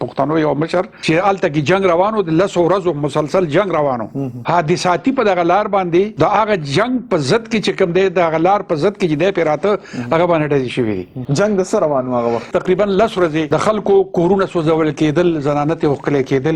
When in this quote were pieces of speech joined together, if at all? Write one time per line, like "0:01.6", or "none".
0:00.9
0:04.3
0:06.1
0:11.1
0:12.5
0:13.5